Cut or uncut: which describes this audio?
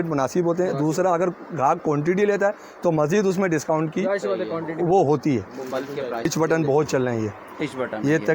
cut